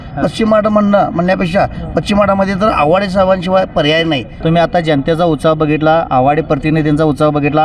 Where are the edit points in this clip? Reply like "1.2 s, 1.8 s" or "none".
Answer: 4.3 s